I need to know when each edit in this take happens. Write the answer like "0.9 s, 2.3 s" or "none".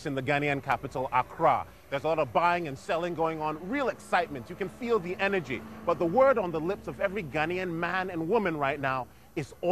8.8 s